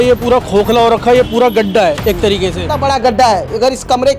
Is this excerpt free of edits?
no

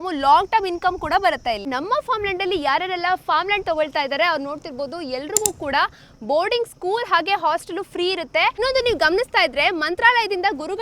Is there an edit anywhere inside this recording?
yes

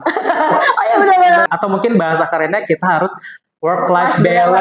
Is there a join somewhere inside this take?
yes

